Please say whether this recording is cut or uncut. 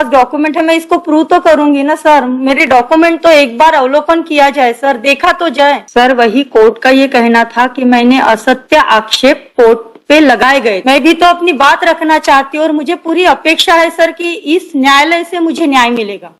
cut